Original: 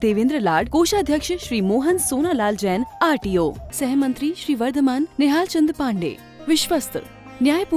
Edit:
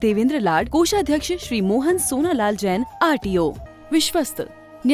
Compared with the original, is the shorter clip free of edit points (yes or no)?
no